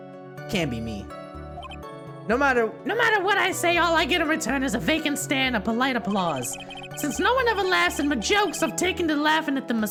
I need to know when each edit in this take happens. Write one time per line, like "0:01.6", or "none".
none